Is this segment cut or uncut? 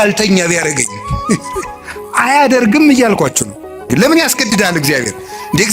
cut